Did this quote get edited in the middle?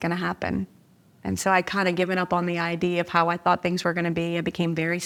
no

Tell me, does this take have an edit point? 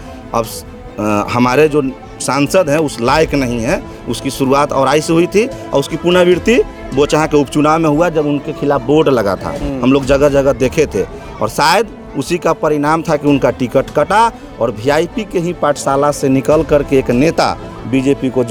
no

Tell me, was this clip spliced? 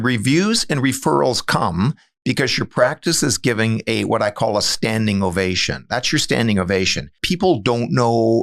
yes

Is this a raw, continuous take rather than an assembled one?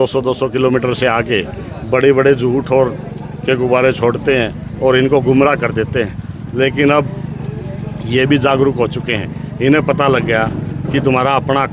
yes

